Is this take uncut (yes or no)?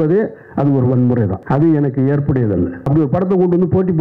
no